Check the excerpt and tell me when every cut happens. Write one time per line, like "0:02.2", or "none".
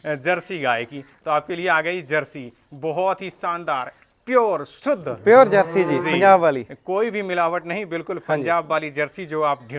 none